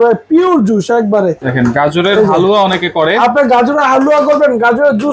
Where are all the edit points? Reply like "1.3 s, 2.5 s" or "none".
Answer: 1.4 s

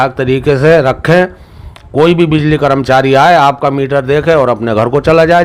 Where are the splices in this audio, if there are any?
none

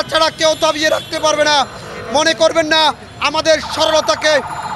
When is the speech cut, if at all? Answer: none

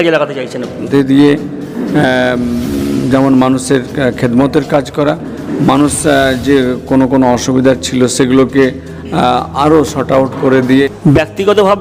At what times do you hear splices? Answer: 0.9 s, 10.9 s

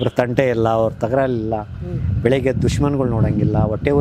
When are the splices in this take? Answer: none

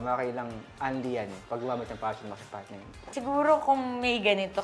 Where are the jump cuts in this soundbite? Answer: 3.1 s

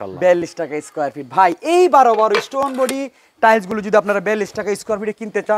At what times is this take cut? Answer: none

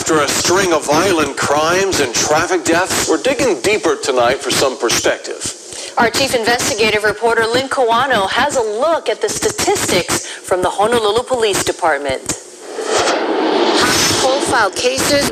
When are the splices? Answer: 3.2 s

